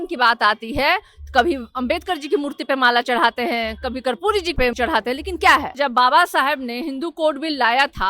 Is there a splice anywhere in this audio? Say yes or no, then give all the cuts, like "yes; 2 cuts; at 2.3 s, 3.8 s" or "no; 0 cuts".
yes; 2 cuts; at 4.6 s, 5.8 s